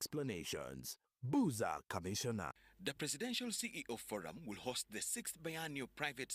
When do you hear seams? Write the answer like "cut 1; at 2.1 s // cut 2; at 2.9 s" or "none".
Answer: cut 1; at 2.7 s